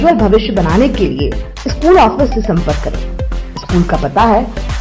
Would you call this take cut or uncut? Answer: uncut